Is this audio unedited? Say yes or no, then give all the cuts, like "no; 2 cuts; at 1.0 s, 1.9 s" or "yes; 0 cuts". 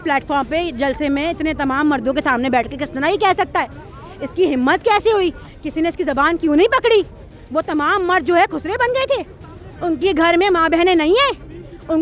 yes; 0 cuts